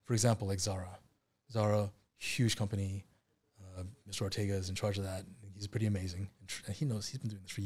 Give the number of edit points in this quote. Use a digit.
0